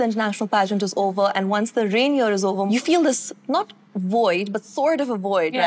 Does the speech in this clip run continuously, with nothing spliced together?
yes; 0 cuts

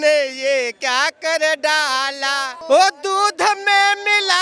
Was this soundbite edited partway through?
yes; 1 cut; at 2.5 s

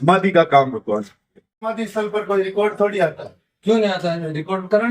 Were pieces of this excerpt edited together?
yes; 1 cut; at 1.7 s

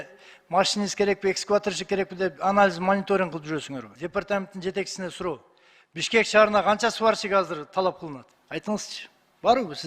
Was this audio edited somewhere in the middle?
yes; 2 cuts; at 3.9 s, 8.3 s

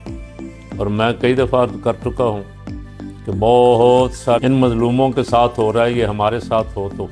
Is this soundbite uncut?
no; 1 cut; at 4.4 s

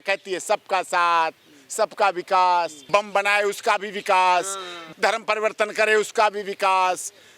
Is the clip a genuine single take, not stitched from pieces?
no; 2 cuts; at 2.8 s, 4.8 s

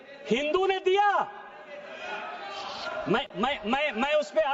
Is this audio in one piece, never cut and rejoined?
yes; 0 cuts

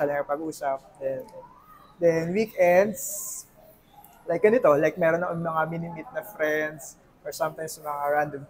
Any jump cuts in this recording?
no; 0 cuts

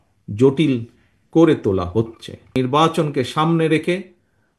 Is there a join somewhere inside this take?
yes; 1 cut; at 2.5 s

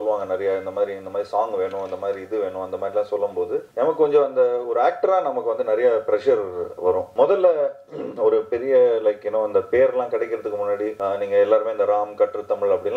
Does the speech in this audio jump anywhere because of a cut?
yes; 3 cuts; at 3.7 s, 7.1 s, 10.9 s

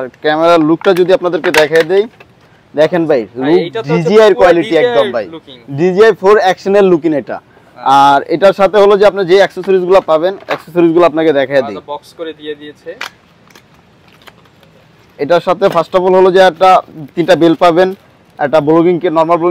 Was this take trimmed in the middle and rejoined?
no; 0 cuts

